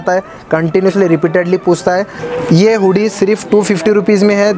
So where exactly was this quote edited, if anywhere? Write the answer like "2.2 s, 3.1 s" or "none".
2.2 s